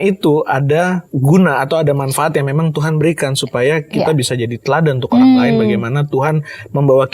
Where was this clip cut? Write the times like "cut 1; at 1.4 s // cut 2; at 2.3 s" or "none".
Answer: cut 1; at 1.1 s